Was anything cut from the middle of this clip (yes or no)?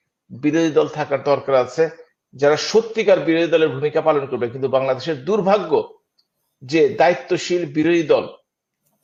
no